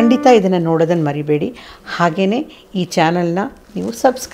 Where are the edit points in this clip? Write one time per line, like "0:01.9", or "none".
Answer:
none